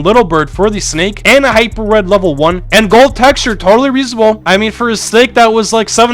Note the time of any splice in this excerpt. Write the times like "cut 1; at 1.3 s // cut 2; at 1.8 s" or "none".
cut 1; at 2.6 s